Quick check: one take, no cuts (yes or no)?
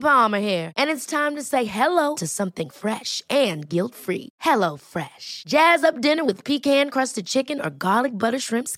yes